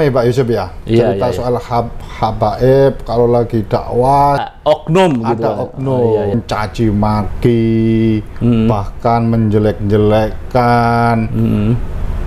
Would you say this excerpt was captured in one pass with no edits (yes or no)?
no